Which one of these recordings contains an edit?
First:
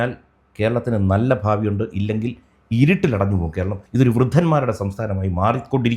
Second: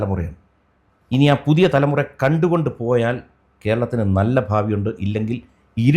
first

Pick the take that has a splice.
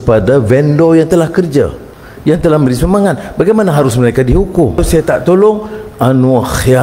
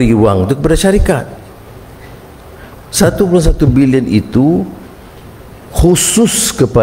first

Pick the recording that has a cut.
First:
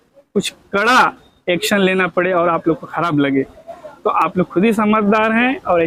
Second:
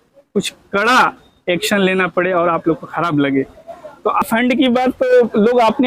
second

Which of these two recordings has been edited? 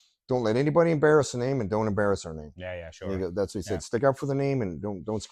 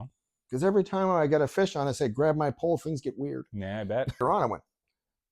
second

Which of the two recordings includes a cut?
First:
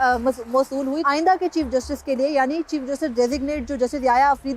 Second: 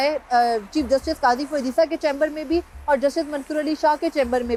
first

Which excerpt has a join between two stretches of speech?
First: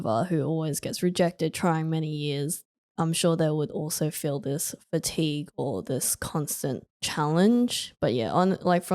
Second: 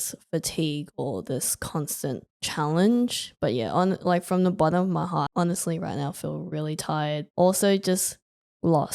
second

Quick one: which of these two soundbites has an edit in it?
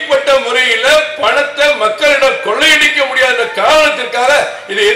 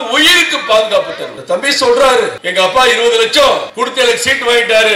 second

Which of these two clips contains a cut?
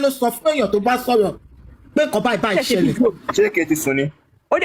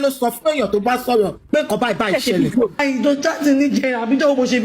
second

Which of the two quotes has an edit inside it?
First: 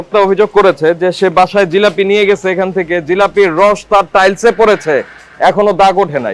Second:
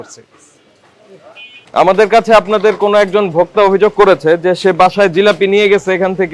second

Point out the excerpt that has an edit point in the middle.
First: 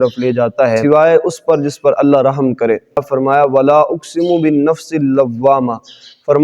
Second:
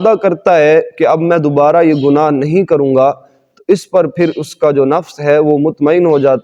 first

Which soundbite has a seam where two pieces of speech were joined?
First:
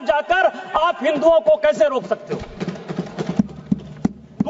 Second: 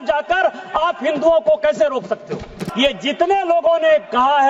second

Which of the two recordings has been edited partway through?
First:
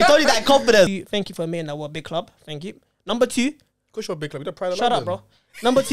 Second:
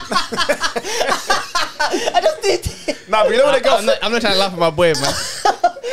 first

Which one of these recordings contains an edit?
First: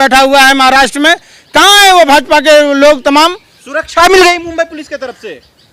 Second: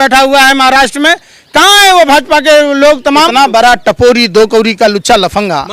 second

